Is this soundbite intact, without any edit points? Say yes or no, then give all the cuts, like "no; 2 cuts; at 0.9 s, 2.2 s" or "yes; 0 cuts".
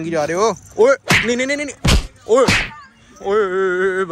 yes; 0 cuts